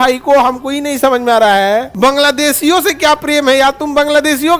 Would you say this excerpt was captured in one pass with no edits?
yes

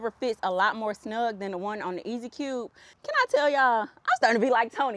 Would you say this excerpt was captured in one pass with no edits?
no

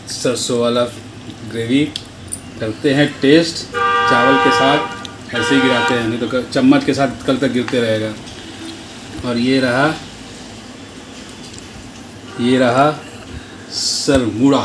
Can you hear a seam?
no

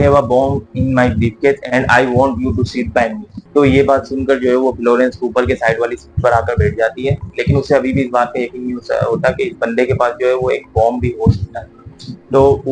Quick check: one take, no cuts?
yes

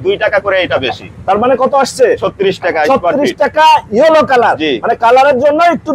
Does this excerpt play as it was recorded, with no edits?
yes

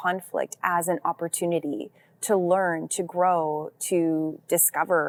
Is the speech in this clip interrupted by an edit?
no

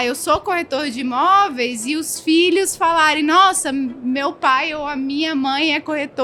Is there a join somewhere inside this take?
no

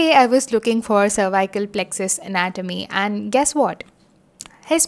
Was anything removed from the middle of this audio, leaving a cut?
no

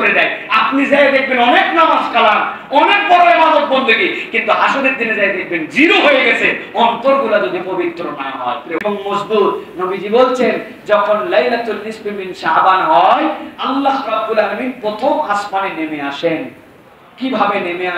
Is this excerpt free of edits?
no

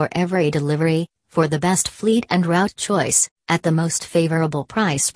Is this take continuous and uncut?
yes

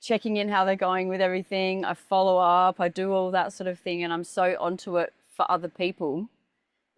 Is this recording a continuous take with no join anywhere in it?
yes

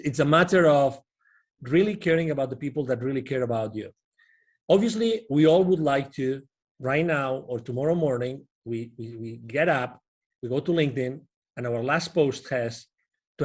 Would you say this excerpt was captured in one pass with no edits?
yes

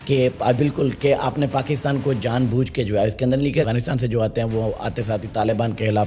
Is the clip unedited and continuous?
no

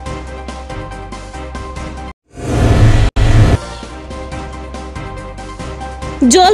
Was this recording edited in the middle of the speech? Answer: yes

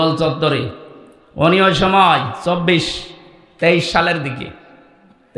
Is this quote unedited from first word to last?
yes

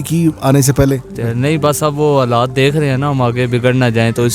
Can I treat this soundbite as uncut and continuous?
no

